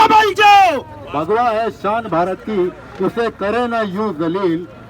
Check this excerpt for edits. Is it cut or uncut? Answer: uncut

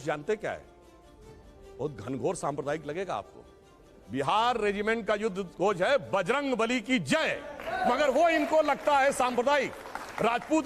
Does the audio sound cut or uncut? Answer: uncut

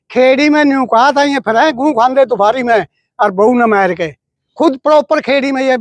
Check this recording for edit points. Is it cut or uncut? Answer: uncut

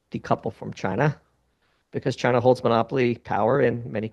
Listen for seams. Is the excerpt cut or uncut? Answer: uncut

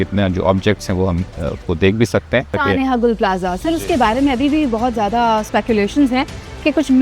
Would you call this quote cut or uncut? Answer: cut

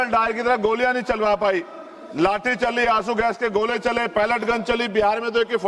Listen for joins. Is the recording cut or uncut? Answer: uncut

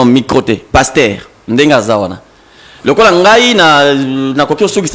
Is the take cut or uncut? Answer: uncut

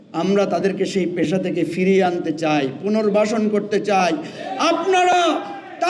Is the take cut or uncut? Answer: uncut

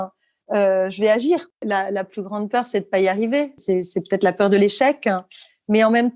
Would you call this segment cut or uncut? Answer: cut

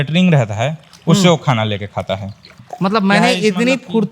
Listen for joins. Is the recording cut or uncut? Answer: cut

